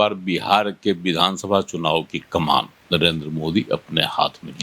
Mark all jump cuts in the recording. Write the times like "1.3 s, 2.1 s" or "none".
2.8 s